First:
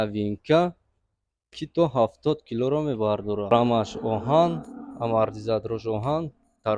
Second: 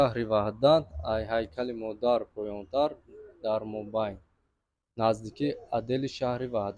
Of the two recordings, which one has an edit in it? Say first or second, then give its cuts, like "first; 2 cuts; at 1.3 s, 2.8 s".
first; 1 cut; at 3.5 s